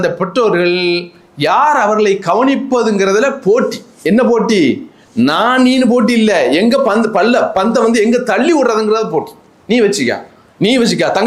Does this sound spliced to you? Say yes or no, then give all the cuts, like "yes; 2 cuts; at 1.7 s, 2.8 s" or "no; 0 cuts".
no; 0 cuts